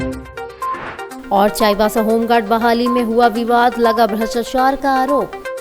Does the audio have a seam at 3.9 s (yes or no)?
no